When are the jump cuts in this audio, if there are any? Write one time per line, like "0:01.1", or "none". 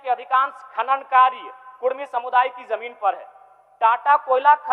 none